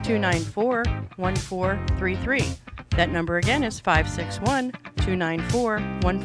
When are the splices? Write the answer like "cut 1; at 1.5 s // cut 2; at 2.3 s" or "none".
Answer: none